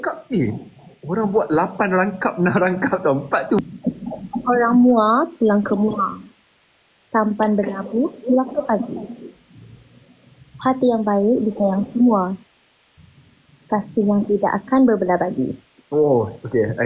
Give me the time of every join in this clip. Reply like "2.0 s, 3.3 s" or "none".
3.6 s